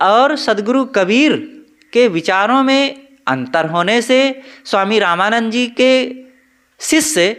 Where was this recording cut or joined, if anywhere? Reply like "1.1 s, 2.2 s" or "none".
none